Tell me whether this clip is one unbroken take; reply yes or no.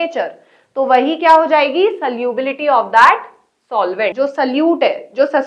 no